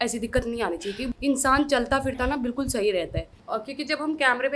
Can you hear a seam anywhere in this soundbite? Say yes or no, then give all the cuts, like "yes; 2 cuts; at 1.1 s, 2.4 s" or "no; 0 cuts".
yes; 2 cuts; at 1.1 s, 3.3 s